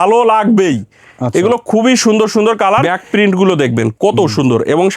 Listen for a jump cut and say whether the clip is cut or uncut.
cut